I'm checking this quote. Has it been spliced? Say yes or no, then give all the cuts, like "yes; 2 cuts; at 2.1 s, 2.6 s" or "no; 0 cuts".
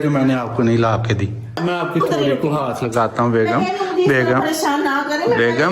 yes; 1 cut; at 1.5 s